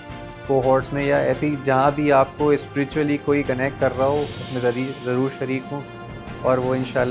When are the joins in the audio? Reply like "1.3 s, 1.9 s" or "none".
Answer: none